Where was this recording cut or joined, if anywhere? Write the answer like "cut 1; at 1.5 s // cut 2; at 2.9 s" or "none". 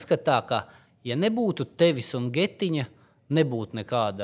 none